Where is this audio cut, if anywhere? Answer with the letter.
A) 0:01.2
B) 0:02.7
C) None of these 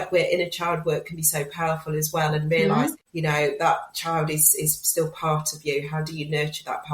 B